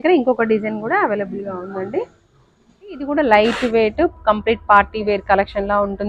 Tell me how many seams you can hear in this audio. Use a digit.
1